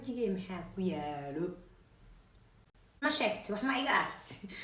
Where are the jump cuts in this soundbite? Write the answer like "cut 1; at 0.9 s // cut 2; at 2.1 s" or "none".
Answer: cut 1; at 3.0 s

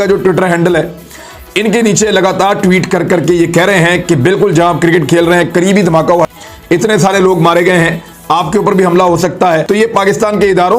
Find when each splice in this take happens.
cut 1; at 6.3 s // cut 2; at 9.6 s

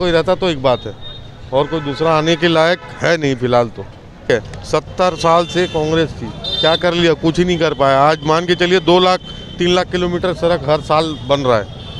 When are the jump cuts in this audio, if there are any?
cut 1; at 4.2 s

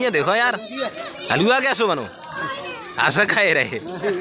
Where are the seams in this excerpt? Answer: none

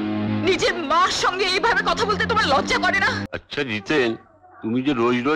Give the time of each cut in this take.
cut 1; at 3.2 s

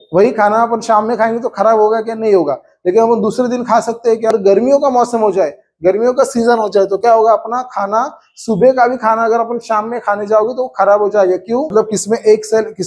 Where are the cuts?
cut 1; at 4.3 s // cut 2; at 11.7 s

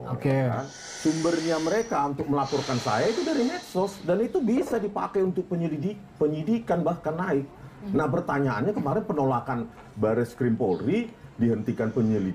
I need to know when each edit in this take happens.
none

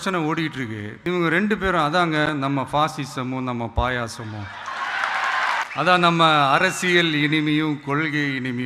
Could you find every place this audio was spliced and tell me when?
cut 1; at 0.9 s // cut 2; at 5.7 s

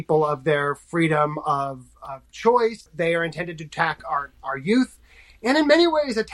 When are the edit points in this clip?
cut 1; at 2.9 s

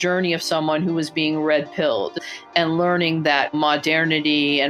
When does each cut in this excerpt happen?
cut 1; at 2.2 s

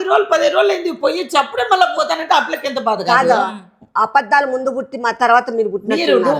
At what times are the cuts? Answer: none

